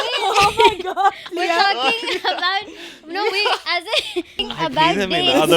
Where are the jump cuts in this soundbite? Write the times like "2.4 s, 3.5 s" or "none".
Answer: 4.4 s